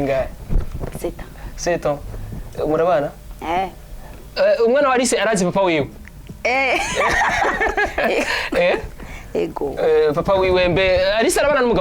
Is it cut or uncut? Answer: uncut